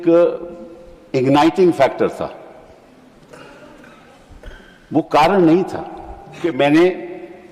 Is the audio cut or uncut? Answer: cut